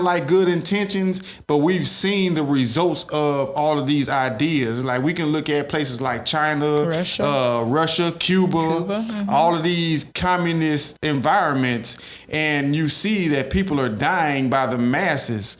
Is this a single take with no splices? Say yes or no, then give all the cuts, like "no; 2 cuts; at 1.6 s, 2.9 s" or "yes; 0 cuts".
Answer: no; 1 cut; at 10.9 s